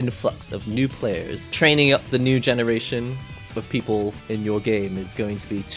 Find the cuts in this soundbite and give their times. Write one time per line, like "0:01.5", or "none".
0:01.4